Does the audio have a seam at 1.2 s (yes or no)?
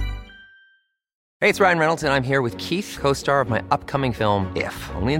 yes